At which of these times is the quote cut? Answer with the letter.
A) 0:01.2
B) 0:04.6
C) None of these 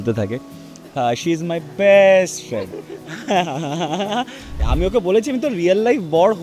B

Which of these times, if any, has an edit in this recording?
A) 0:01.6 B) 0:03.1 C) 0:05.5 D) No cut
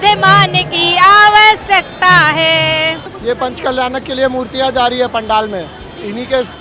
B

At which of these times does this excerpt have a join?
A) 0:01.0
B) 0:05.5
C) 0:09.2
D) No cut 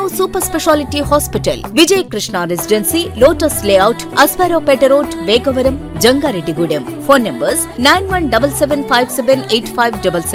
D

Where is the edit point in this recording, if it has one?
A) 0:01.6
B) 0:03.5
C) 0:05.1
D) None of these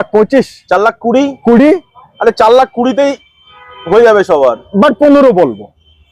D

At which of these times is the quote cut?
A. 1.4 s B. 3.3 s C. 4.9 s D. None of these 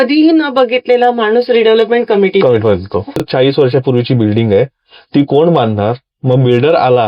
B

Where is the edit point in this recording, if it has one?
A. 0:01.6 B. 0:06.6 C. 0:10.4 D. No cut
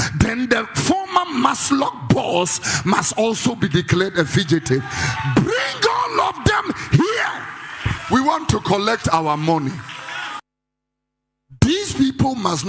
C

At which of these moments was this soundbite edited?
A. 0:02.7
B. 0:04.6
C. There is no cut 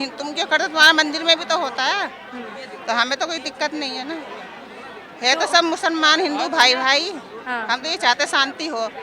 C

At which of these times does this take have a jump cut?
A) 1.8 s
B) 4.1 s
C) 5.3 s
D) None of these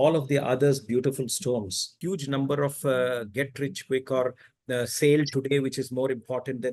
A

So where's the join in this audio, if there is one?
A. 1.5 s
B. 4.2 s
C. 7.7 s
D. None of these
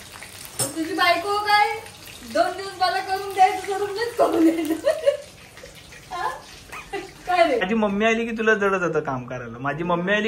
C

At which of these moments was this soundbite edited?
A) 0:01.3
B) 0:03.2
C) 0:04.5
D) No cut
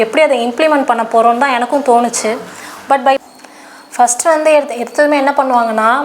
B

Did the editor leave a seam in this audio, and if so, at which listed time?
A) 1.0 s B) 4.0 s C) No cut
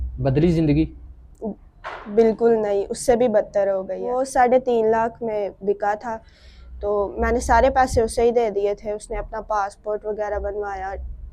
B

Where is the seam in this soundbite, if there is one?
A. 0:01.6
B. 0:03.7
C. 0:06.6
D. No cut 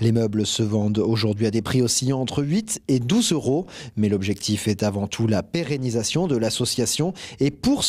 D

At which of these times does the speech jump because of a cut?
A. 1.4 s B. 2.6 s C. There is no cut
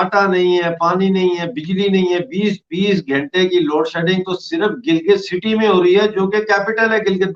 C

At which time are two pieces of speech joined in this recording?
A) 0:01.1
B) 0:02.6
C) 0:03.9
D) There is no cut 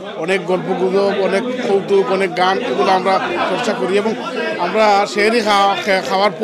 D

